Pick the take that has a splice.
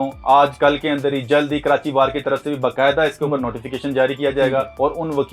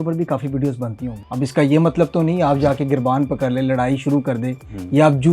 second; 1 cut; at 1.2 s

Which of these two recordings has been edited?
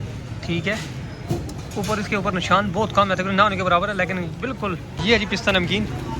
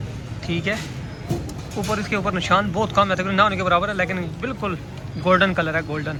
first; 1 cut; at 4.9 s

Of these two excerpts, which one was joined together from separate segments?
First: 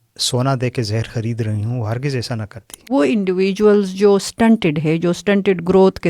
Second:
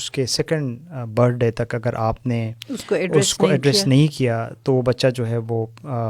first; 1 cut; at 2.9 s

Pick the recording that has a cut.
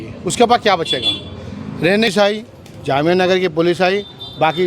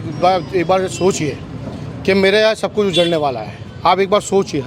first; 1 cut; at 2.1 s

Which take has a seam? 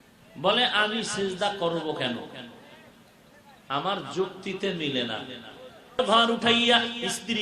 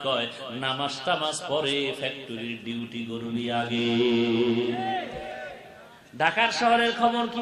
first; 1 cut; at 6.0 s

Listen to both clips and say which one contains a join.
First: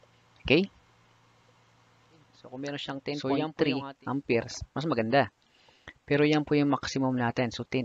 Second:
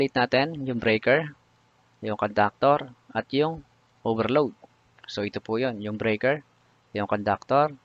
first; 1 cut; at 2.4 s

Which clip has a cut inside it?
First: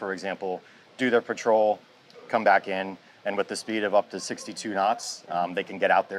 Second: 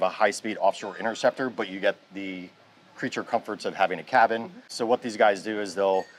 second; 1 cut; at 4.7 s

